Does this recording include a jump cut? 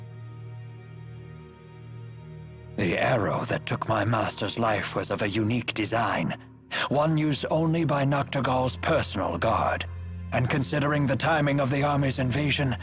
yes; 1 cut; at 2.8 s

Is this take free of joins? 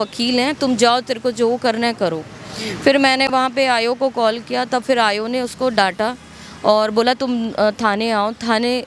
yes; 0 cuts

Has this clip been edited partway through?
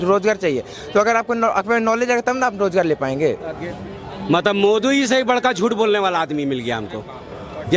yes; 1 cut; at 3.7 s

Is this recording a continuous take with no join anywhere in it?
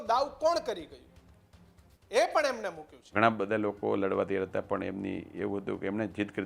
no; 1 cut; at 3.1 s

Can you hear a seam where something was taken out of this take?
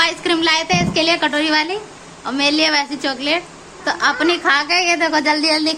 no; 0 cuts

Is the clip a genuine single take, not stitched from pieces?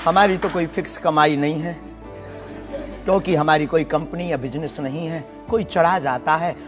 yes; 0 cuts

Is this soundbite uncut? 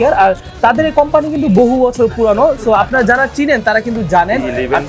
yes; 0 cuts

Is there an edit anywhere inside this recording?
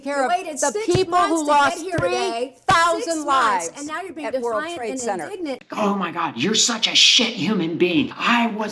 yes; 1 cut; at 5.6 s

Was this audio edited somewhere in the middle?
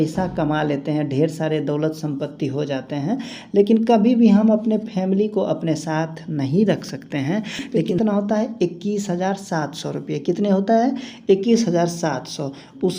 yes; 1 cut; at 7.8 s

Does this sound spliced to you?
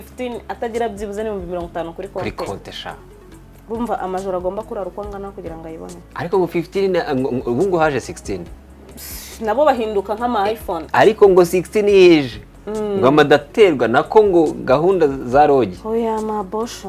no; 0 cuts

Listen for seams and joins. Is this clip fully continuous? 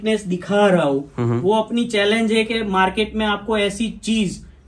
yes; 0 cuts

